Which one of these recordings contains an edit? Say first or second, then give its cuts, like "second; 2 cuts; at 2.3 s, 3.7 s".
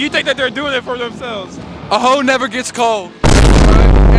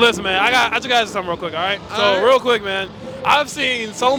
first; 1 cut; at 3.1 s